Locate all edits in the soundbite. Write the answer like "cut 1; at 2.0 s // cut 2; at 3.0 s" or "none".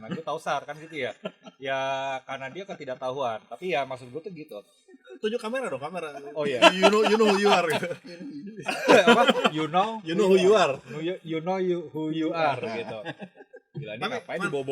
none